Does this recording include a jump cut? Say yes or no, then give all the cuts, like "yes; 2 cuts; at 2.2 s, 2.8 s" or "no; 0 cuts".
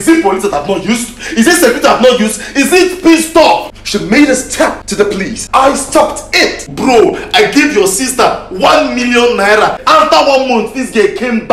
yes; 4 cuts; at 3.7 s, 5.1 s, 6.7 s, 9.8 s